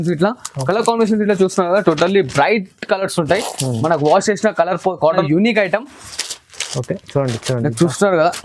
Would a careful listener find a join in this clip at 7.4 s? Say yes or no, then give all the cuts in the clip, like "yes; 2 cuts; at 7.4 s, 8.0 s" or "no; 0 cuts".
no; 1 cut; at 5.0 s